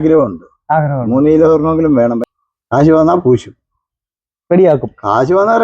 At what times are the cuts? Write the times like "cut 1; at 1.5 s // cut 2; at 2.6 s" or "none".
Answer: cut 1; at 2.2 s

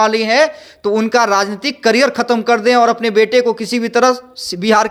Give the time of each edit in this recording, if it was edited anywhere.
none

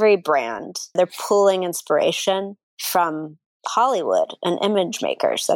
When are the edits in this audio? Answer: cut 1; at 0.9 s

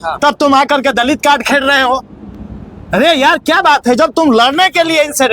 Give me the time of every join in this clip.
none

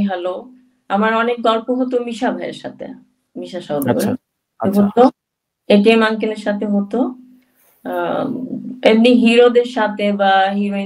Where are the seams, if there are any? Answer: none

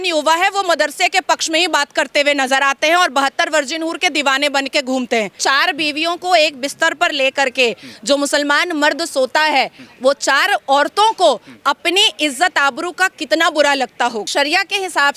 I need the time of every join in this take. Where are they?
cut 1; at 5.3 s // cut 2; at 14.3 s

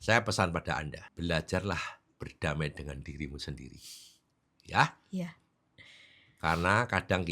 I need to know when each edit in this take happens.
cut 1; at 1.0 s

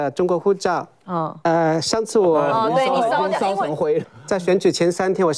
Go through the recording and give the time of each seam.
cut 1; at 4.1 s

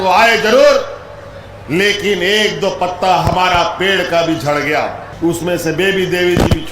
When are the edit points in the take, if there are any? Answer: cut 1; at 5.0 s

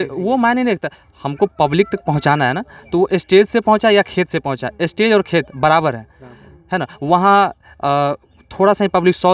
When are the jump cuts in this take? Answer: none

